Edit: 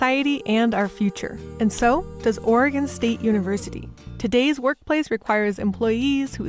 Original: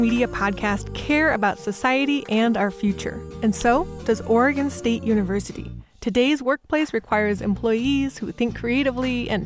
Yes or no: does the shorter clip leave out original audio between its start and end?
no